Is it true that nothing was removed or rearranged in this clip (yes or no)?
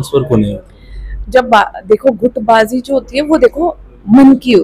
yes